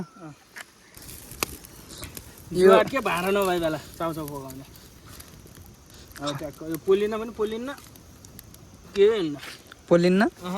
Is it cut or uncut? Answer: cut